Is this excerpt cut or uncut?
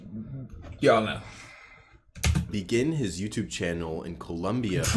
uncut